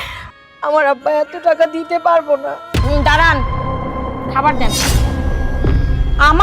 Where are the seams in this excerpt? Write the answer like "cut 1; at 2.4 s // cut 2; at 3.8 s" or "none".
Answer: cut 1; at 2.6 s